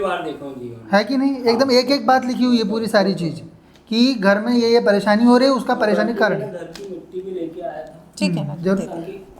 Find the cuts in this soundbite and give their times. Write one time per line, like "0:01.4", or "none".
none